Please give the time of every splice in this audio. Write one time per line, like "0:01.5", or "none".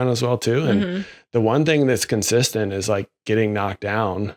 none